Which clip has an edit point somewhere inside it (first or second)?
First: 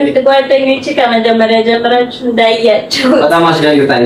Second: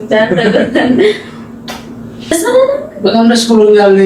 second